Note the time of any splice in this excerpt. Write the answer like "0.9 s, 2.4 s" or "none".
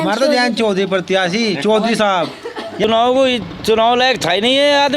2.8 s